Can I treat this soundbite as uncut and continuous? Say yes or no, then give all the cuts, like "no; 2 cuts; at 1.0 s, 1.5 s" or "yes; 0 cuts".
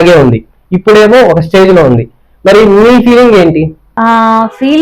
no; 1 cut; at 3.8 s